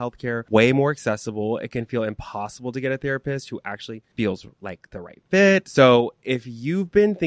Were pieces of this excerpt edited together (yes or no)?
yes